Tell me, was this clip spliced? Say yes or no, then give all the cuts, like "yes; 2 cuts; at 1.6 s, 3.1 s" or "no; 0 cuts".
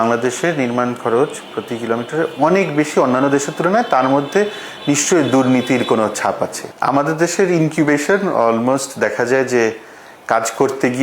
yes; 1 cut; at 6.7 s